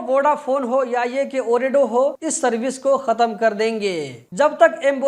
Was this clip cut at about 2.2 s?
yes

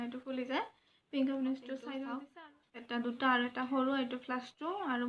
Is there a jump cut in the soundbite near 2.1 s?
yes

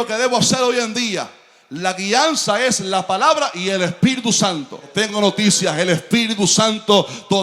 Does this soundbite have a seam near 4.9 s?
yes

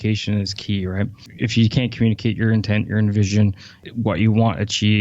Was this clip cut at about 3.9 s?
yes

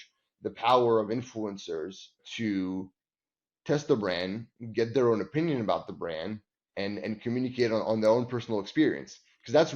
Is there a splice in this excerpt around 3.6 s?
no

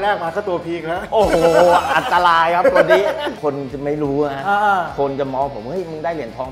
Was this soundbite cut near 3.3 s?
yes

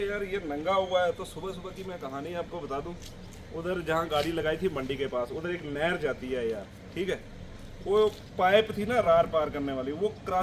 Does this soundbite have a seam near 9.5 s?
no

